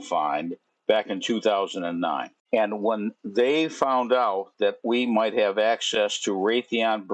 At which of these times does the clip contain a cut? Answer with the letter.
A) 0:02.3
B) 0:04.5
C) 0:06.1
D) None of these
A